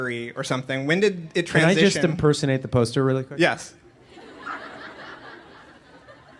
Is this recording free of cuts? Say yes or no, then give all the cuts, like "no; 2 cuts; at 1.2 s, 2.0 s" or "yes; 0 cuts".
no; 1 cut; at 2.0 s